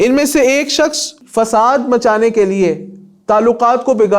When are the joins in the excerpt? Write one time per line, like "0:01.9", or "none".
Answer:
0:01.2